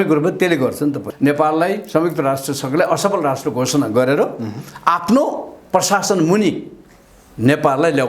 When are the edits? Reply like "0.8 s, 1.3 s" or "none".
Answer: 1.1 s